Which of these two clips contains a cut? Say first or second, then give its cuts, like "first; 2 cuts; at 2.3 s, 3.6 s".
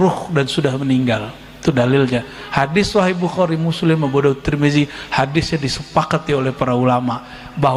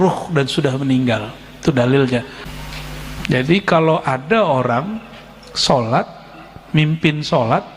second; 1 cut; at 2.4 s